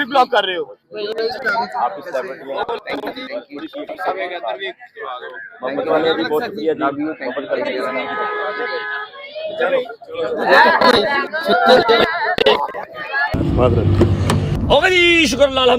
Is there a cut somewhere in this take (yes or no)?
no